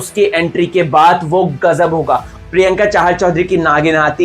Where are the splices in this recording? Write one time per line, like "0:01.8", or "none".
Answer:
0:02.3